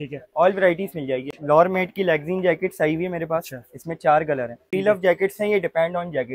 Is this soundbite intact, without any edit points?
no; 2 cuts; at 1.3 s, 4.7 s

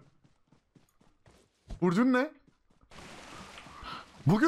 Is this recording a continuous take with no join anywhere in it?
no; 1 cut; at 2.9 s

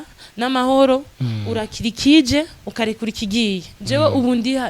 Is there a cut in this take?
yes; 1 cut; at 3.7 s

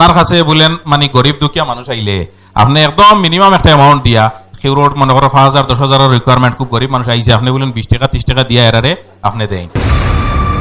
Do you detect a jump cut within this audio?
yes; 1 cut; at 9.7 s

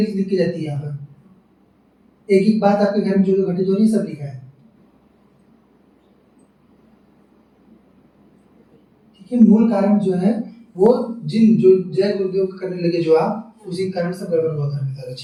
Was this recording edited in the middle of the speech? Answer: no; 0 cuts

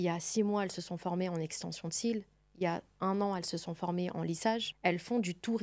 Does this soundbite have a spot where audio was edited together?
yes; 1 cut; at 4.7 s

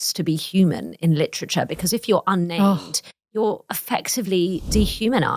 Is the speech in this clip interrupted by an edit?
no; 0 cuts

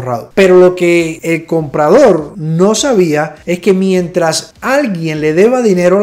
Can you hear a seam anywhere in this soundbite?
no; 0 cuts

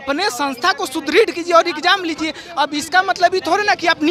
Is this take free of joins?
yes; 0 cuts

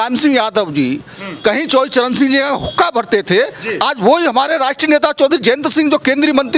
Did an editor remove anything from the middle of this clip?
no; 0 cuts

